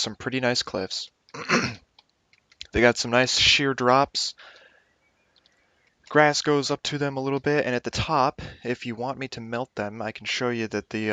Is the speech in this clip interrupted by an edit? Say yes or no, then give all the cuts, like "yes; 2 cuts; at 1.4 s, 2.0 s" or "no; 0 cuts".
no; 0 cuts